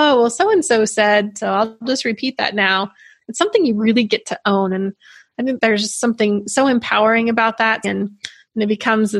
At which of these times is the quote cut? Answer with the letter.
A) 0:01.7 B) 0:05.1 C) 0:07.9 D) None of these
C